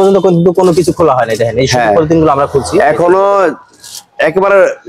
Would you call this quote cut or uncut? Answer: uncut